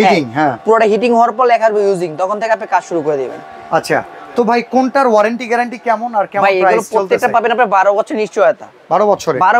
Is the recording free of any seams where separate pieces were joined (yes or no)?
yes